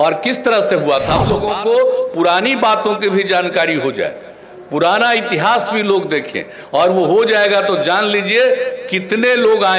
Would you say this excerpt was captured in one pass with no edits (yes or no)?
no